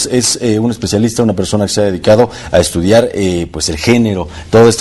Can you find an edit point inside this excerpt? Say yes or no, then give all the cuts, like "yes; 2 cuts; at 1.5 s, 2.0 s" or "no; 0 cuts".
no; 0 cuts